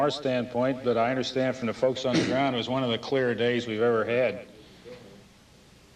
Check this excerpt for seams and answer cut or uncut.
cut